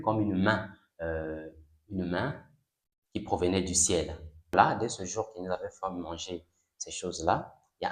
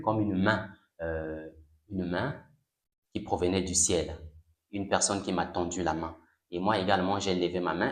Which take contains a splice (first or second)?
first